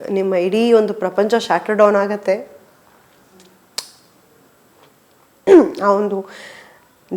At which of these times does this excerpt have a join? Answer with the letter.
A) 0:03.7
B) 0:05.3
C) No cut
B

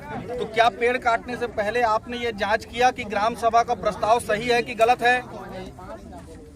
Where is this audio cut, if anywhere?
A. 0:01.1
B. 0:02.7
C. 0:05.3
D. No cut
D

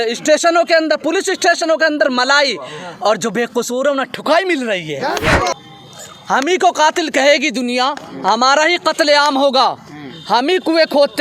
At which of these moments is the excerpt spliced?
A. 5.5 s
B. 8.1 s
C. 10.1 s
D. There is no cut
A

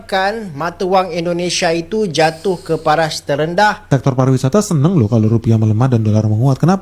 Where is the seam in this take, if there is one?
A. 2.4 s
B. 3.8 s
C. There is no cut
B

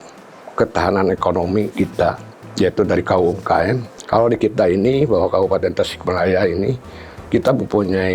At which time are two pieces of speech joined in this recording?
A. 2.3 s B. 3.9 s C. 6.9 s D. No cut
B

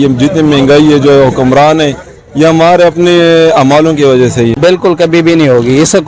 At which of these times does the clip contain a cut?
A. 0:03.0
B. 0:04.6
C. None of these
B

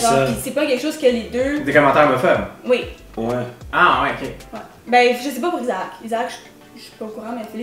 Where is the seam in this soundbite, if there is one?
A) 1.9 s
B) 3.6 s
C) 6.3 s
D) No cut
D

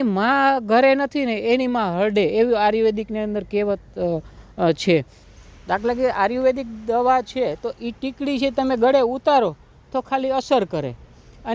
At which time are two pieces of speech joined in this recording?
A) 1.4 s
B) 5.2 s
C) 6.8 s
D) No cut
B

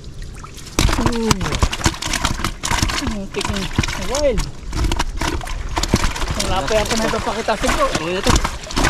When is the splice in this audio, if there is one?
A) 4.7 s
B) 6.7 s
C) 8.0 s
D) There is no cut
C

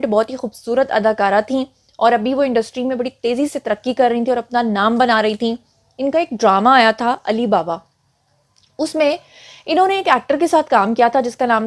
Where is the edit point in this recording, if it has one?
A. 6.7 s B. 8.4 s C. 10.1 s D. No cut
D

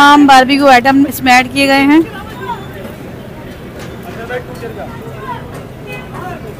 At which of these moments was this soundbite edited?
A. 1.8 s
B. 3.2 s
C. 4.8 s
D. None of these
D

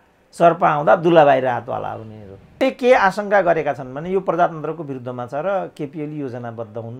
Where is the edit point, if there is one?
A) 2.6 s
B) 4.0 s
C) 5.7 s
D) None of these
A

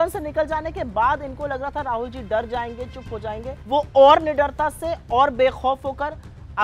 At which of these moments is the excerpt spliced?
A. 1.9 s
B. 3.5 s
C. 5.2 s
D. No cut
B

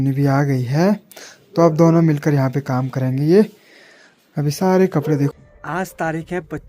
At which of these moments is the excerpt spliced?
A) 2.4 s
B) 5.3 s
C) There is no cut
B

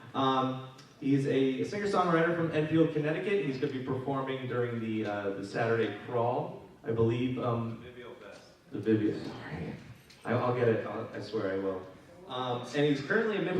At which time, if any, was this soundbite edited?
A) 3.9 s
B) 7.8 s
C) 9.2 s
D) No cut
C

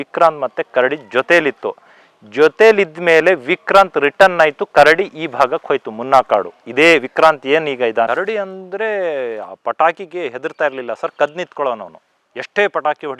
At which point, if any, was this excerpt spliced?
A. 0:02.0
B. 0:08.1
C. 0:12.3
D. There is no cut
B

